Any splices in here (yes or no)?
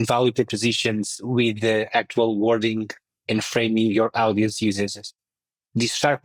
no